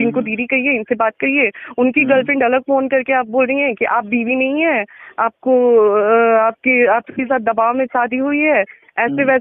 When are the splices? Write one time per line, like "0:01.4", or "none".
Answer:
none